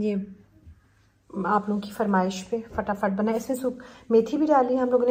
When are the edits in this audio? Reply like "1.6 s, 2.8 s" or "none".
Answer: none